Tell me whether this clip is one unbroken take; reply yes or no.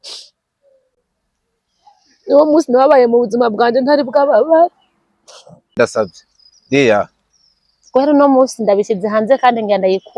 no